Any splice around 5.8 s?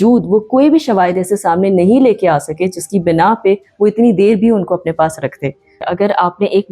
yes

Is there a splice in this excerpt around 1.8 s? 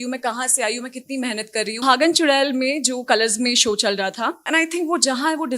yes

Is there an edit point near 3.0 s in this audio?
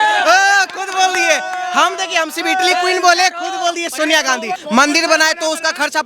no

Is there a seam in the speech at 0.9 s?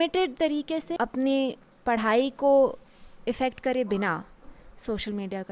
yes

